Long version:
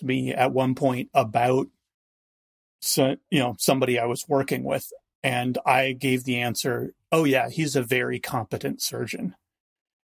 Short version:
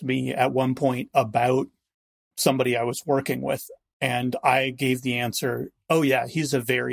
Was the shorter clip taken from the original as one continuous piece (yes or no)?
no